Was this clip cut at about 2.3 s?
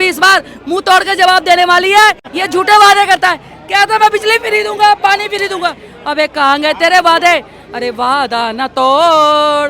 yes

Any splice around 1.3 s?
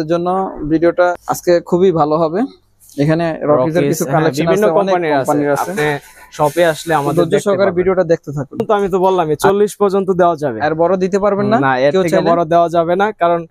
yes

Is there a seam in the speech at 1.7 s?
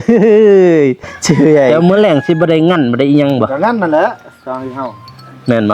yes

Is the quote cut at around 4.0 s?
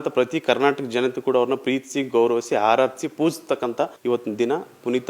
yes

